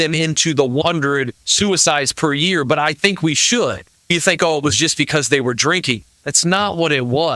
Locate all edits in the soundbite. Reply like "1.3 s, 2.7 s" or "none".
1.0 s, 4.1 s